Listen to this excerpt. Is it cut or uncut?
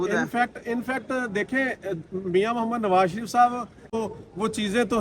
cut